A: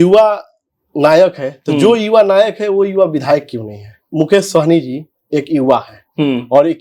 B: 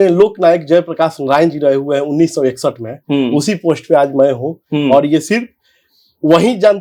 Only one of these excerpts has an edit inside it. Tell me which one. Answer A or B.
A